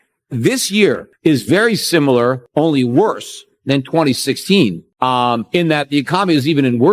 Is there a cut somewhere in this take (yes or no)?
yes